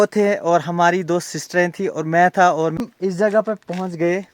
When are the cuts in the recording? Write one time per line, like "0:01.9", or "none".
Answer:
0:02.8